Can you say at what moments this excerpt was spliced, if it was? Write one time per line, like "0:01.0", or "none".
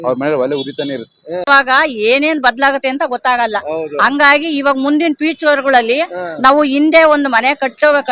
0:01.5